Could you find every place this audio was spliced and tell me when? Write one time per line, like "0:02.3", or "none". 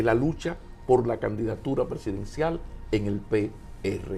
none